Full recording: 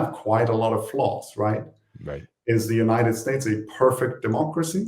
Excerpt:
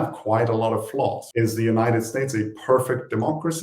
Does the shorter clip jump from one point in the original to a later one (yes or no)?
yes